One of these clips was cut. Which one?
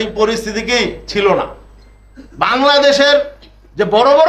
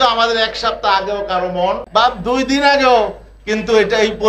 second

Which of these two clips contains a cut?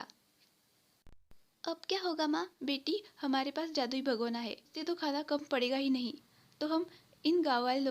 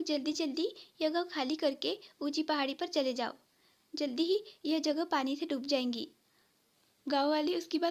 first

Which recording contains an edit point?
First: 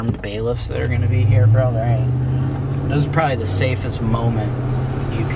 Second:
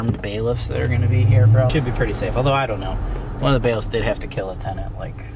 second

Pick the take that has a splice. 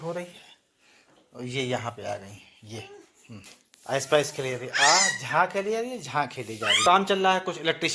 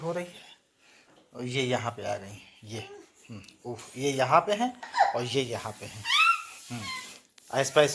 first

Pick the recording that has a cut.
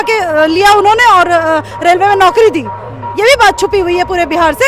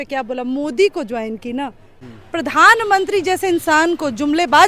second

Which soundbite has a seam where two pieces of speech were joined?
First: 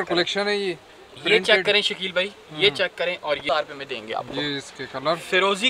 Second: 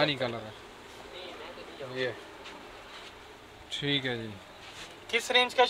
first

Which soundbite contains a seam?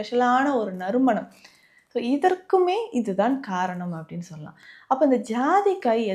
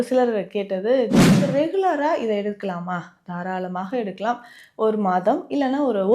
second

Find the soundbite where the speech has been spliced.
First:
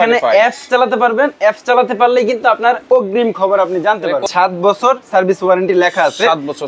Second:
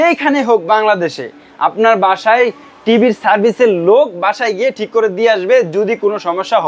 first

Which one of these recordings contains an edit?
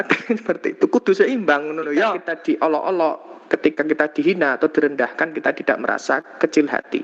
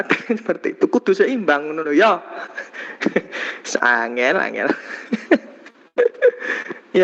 first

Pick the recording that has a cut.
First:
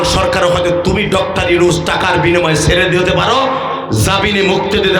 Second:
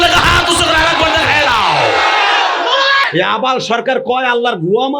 second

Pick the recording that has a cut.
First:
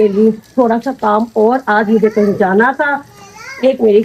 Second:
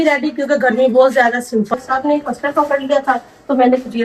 second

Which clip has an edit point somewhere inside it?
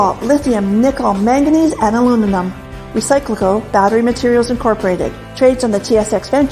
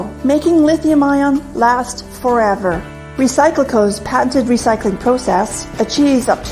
second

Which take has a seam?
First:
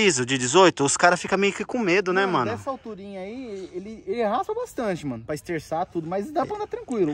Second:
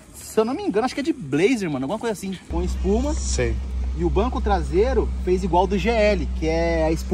second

